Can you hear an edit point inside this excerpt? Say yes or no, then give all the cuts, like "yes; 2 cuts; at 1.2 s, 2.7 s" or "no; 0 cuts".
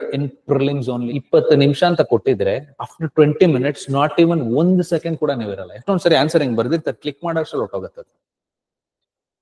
yes; 1 cut; at 1.2 s